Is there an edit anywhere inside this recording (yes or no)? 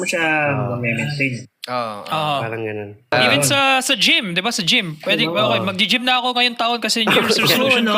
yes